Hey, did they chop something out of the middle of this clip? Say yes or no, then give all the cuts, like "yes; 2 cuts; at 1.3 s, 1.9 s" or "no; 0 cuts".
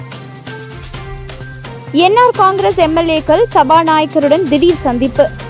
yes; 1 cut; at 1.0 s